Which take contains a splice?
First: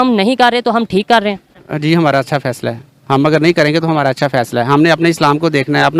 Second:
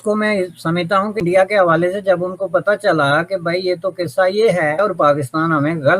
second; 2 cuts; at 1.2 s, 4.8 s

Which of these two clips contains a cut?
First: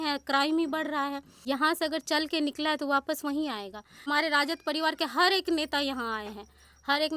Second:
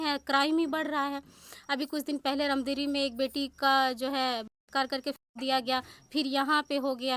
first; 2 cuts; at 1.3 s, 4.1 s

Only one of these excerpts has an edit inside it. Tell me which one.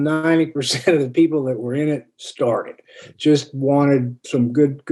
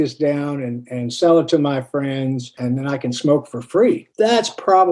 second; 2 cuts; at 2.6 s, 4.1 s

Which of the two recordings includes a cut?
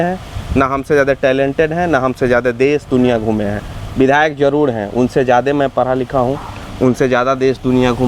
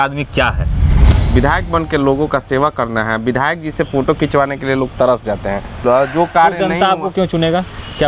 second; 2 cuts; at 1.1 s, 5.8 s

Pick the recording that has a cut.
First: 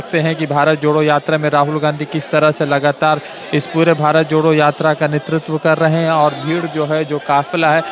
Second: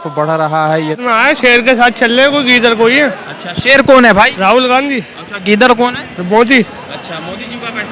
second; 1 cut; at 1.0 s

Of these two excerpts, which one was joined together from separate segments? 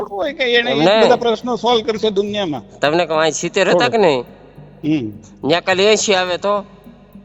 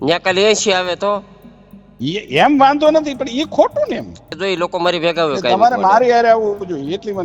second; 1 cut; at 4.3 s

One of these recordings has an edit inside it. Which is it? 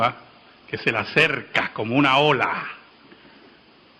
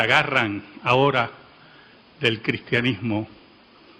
second; 1 cut; at 1.1 s

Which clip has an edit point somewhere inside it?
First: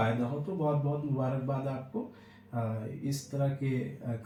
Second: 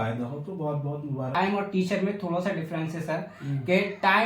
second; 1 cut; at 1.4 s

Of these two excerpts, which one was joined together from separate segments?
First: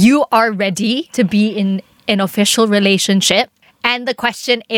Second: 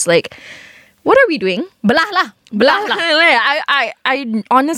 first; 1 cut; at 1.1 s

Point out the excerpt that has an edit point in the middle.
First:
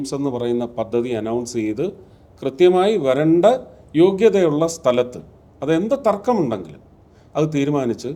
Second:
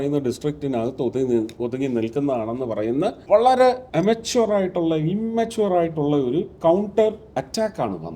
second; 3 cuts; at 3.2 s, 3.8 s, 7.2 s

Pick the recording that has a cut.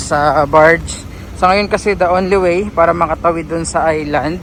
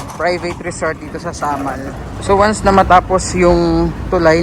second; 1 cut; at 2.1 s

